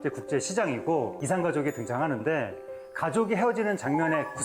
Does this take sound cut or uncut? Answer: cut